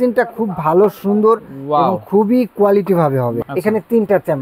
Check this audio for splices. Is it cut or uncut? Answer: cut